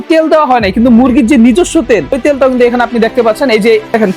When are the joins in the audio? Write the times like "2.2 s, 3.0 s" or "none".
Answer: 2.2 s